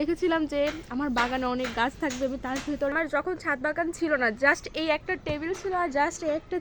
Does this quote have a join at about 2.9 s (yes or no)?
yes